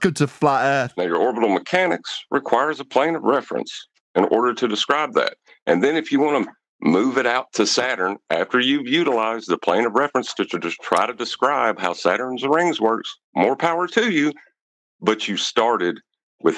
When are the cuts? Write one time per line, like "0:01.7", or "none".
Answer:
0:01.0